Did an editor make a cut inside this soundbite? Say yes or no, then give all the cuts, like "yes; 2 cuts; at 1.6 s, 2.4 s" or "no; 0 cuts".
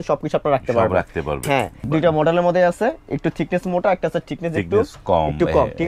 yes; 1 cut; at 1.8 s